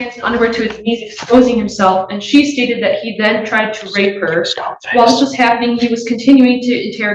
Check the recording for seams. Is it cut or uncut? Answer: uncut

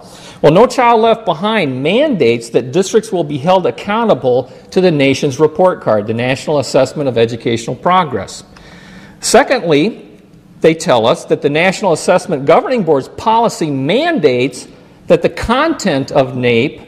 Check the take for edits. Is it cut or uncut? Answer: uncut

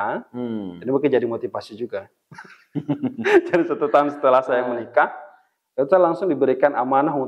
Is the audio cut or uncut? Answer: uncut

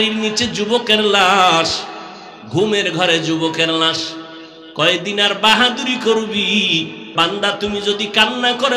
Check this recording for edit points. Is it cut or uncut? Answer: cut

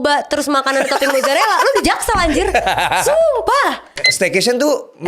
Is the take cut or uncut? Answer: cut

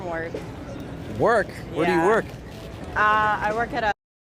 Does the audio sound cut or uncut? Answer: cut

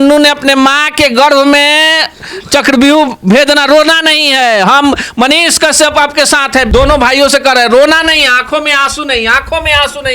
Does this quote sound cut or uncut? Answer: cut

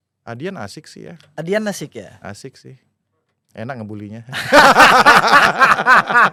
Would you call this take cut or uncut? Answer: uncut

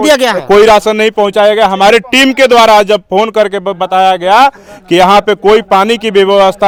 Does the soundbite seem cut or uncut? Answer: uncut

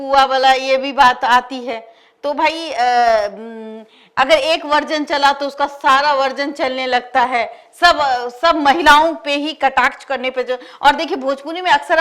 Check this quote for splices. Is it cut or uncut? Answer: uncut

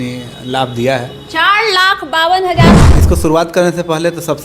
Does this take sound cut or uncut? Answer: cut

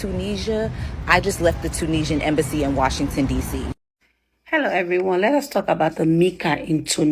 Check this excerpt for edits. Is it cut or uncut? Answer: cut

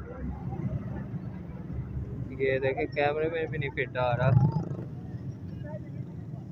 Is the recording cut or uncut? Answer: cut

